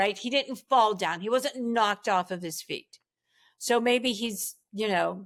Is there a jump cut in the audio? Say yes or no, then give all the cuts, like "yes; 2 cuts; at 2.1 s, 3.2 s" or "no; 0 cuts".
no; 0 cuts